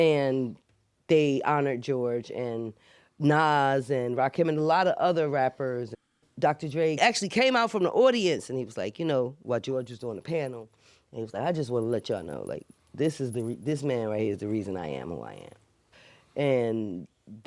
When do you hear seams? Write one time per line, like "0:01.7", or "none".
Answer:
0:05.9
0:07.0